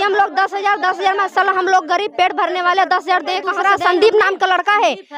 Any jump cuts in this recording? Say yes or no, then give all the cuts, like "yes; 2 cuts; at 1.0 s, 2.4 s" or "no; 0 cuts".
yes; 1 cut; at 3.5 s